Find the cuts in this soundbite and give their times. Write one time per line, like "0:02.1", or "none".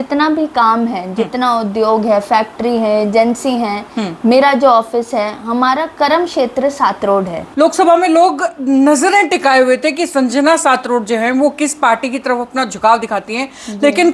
0:07.4